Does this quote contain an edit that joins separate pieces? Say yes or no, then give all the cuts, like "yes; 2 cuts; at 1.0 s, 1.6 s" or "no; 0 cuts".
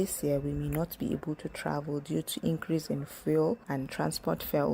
no; 0 cuts